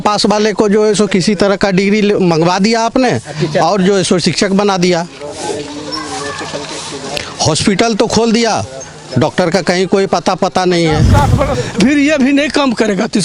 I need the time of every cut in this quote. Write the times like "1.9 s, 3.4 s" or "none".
11.5 s